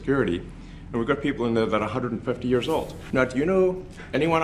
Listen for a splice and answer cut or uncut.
cut